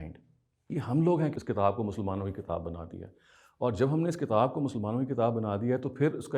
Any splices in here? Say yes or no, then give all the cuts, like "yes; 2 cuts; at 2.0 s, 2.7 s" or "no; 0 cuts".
yes; 1 cut; at 1.4 s